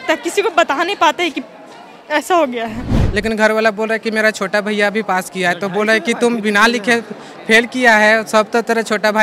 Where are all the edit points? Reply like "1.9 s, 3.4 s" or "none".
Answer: 2.9 s

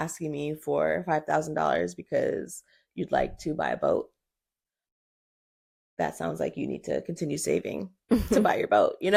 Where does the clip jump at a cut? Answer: none

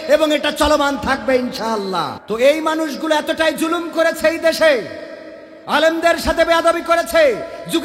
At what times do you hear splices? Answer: 2.2 s

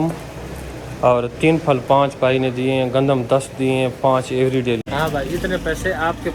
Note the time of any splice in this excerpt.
4.8 s

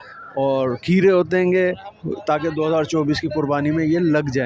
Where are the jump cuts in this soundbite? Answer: none

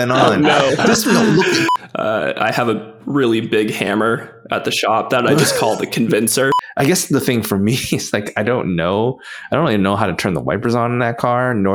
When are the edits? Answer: 1.7 s, 6.6 s

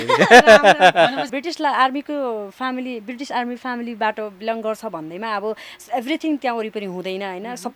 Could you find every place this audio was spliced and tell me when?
1.3 s

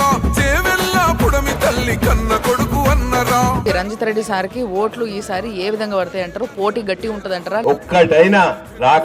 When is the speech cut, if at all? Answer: 3.6 s, 7.6 s

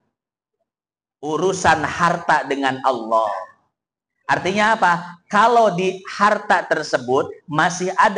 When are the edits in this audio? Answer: none

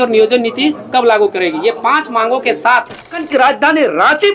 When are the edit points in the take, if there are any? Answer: 3.2 s

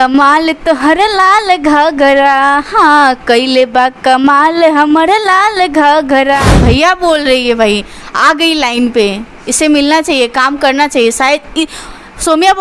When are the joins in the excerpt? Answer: 6.5 s

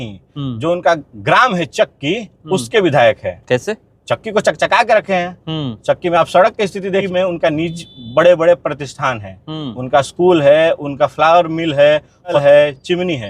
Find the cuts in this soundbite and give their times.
7.1 s, 12.4 s

